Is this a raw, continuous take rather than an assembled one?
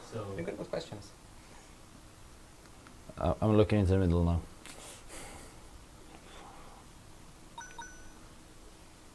yes; 0 cuts

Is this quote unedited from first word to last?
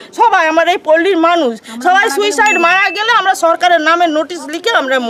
yes; 0 cuts

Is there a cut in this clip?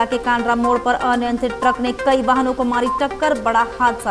no; 0 cuts

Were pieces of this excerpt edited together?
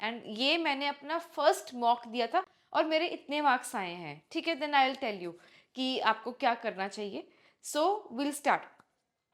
no; 0 cuts

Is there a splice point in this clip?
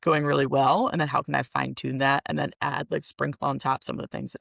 no; 0 cuts

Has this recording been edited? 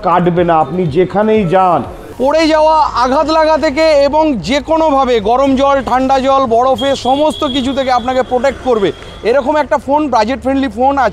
yes; 1 cut; at 2.1 s

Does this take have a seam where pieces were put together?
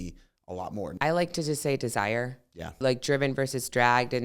yes; 2 cuts; at 0.9 s, 2.8 s

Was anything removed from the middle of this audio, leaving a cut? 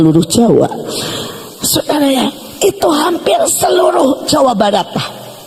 no; 0 cuts

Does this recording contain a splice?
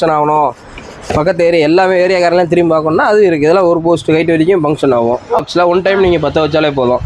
yes; 1 cut; at 5.4 s

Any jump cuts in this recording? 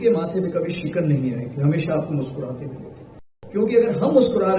yes; 1 cut; at 3.3 s

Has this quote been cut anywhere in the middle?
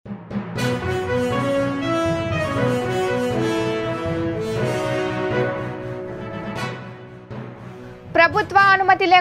yes; 1 cut; at 7.4 s

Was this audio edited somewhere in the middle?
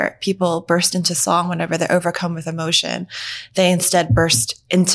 no; 0 cuts

